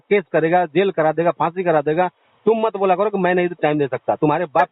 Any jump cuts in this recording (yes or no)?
no